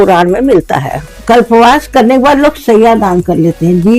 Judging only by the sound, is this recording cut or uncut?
cut